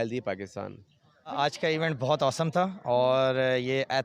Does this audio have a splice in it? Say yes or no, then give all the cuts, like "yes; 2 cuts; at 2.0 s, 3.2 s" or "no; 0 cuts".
yes; 1 cut; at 1.3 s